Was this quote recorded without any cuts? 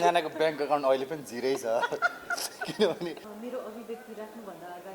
no; 1 cut; at 3.3 s

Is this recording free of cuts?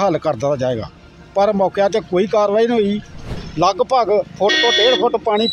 no; 1 cut; at 3.4 s

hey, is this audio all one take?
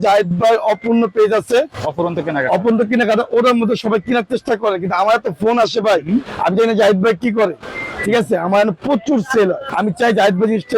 no; 1 cut; at 9.7 s

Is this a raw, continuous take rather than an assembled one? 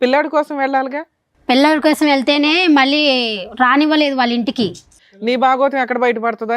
no; 1 cut; at 4.9 s

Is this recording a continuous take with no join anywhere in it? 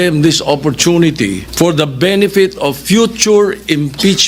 no; 1 cut; at 1.4 s

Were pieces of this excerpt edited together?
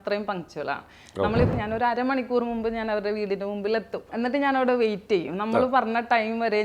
yes; 2 cuts; at 1.5 s, 4.1 s

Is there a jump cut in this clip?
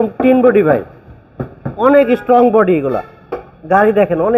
no; 0 cuts

